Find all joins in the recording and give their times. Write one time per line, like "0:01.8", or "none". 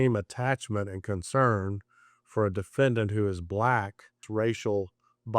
0:04.2